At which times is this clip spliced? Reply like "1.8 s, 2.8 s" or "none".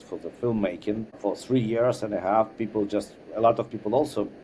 1.2 s

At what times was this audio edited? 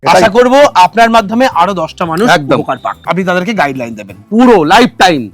3.0 s

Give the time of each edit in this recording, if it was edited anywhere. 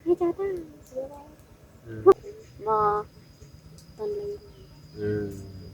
2.1 s

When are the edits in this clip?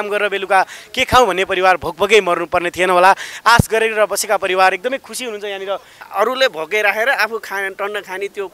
6.0 s

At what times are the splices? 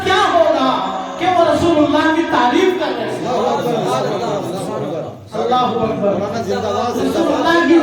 none

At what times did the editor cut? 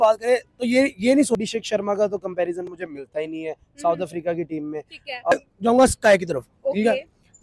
1.4 s, 5.3 s

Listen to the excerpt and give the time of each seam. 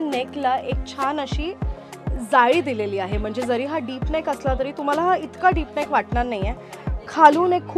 none

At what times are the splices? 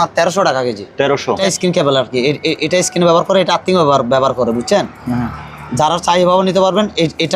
1.4 s

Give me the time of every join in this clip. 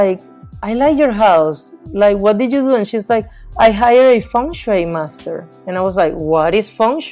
none

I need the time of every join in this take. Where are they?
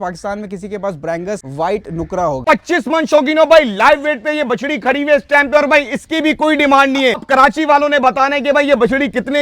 1.5 s, 2.4 s, 7.2 s

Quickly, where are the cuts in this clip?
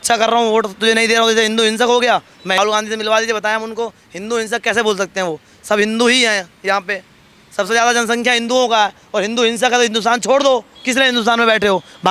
2.6 s

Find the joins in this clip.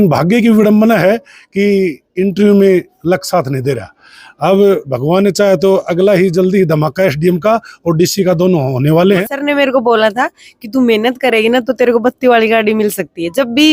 9.2 s

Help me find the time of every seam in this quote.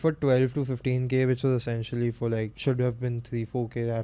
2.5 s

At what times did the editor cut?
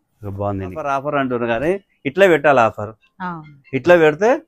0.9 s

